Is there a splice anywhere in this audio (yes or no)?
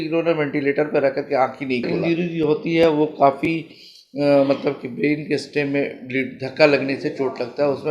yes